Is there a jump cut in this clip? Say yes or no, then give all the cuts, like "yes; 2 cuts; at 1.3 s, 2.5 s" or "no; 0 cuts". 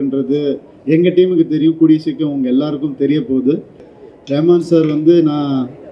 yes; 1 cut; at 3.9 s